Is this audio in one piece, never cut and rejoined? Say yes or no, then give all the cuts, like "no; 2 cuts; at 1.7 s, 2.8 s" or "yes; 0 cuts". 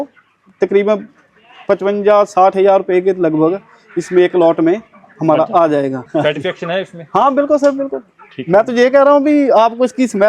no; 1 cut; at 6.0 s